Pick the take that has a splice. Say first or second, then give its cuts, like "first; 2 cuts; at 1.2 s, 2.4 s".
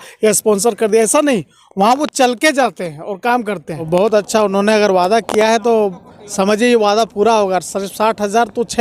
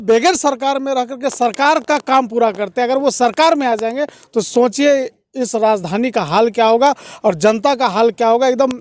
first; 1 cut; at 3.9 s